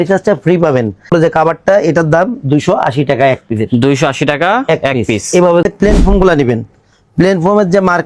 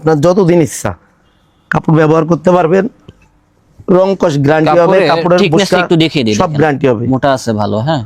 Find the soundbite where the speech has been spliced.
first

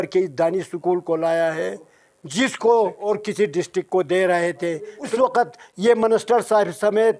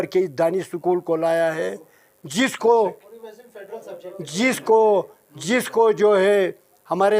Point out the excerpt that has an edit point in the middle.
first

